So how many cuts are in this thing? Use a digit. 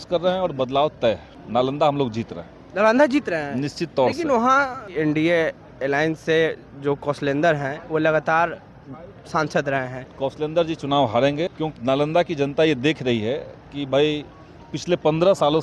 4